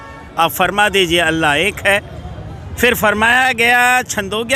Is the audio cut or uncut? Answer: uncut